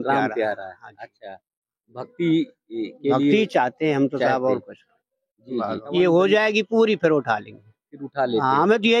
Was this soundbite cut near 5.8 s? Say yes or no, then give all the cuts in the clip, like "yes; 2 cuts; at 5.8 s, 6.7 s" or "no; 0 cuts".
yes; 1 cut; at 5.8 s